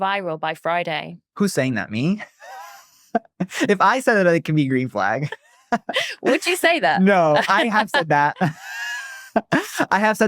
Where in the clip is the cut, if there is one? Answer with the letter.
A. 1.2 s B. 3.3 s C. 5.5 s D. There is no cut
A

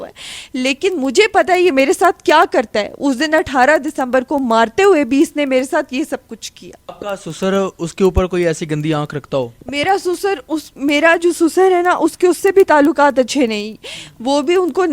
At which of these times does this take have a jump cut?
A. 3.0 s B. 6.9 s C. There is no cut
B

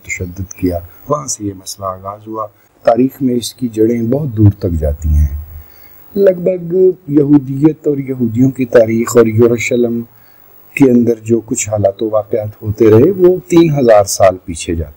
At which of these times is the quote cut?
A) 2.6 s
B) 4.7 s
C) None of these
A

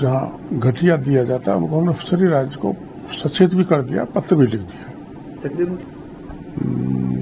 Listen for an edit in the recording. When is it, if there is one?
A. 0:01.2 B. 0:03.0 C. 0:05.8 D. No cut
C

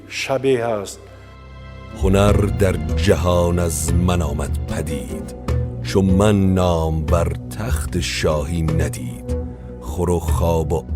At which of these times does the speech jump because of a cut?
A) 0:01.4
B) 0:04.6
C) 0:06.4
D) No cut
A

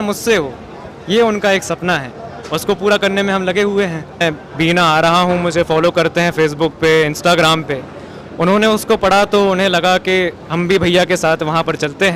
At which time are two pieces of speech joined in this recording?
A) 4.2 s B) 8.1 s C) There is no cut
A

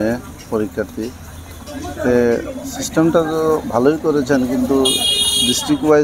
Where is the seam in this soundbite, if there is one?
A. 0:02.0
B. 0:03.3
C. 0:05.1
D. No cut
D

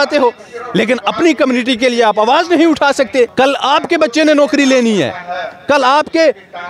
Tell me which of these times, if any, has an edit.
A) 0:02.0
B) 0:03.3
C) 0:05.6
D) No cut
B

